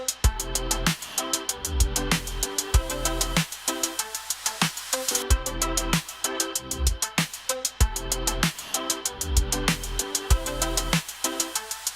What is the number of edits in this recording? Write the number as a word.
one